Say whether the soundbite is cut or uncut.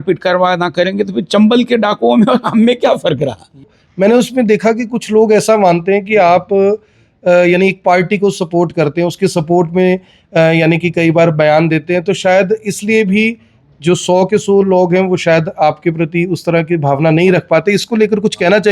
cut